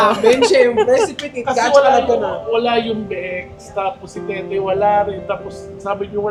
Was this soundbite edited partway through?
no; 0 cuts

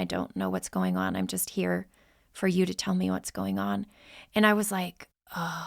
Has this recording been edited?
no; 0 cuts

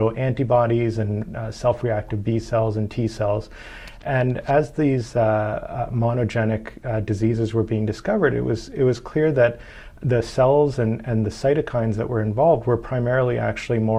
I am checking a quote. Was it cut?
no; 0 cuts

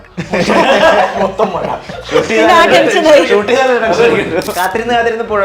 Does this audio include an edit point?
yes; 1 cut; at 4.5 s

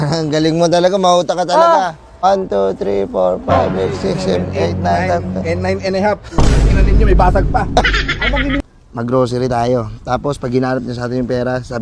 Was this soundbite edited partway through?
yes; 2 cuts; at 2.2 s, 8.6 s

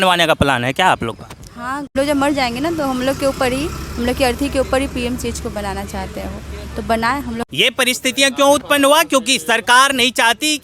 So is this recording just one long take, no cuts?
no; 2 cuts; at 1.9 s, 7.4 s

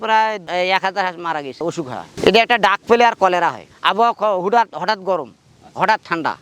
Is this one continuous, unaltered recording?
no; 2 cuts; at 2.0 s, 3.7 s

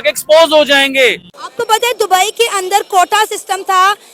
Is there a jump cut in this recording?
no; 0 cuts

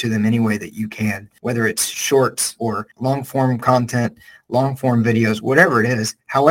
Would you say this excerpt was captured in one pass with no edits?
no; 2 cuts; at 1.3 s, 2.7 s

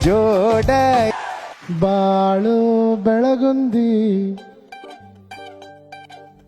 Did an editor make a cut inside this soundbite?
yes; 1 cut; at 1.1 s

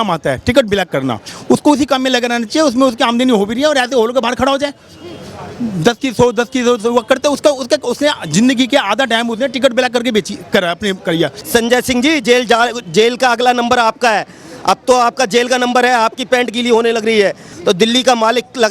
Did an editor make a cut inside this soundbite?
yes; 2 cuts; at 11.4 s, 17.5 s

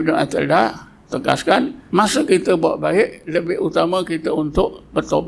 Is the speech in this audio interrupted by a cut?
yes; 2 cuts; at 0.9 s, 1.8 s

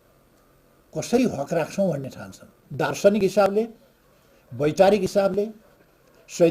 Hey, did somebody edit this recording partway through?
yes; 1 cut; at 2.6 s

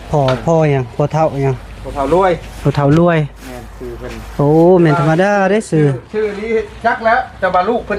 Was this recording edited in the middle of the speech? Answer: no; 0 cuts

